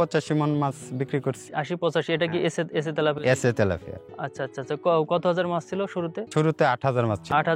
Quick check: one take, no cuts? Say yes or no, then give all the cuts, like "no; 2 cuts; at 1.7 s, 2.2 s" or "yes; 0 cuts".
no; 1 cut; at 1.5 s